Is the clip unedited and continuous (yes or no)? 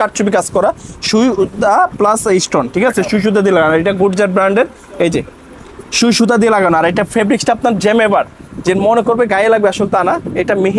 yes